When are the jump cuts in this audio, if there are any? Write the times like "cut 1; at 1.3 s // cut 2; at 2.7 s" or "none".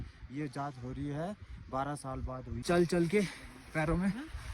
cut 1; at 2.5 s